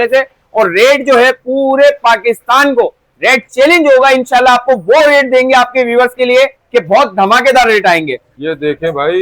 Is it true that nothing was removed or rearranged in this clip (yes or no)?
no